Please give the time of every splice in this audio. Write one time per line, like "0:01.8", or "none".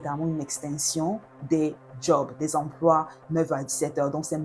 none